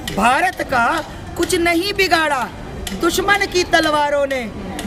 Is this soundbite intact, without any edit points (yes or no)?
yes